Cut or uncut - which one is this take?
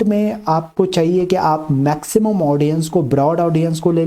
uncut